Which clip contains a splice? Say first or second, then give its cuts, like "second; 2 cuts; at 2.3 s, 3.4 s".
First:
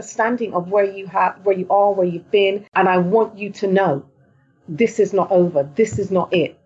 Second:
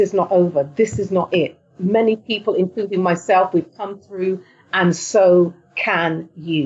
first; 1 cut; at 2.6 s